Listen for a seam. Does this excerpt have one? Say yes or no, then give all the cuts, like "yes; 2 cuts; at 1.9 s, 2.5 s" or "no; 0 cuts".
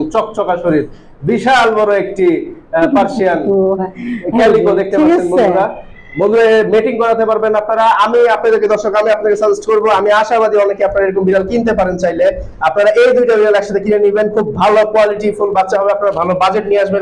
no; 0 cuts